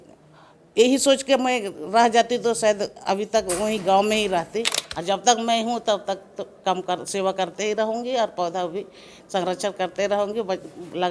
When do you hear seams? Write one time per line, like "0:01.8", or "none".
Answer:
0:04.8